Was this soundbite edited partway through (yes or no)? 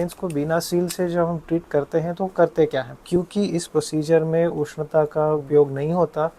yes